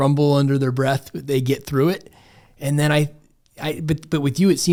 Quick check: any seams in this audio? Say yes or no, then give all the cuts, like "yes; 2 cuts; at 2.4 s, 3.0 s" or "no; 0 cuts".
no; 0 cuts